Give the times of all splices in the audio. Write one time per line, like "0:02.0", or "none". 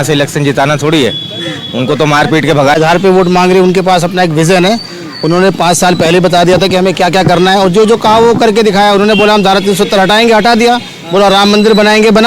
0:02.8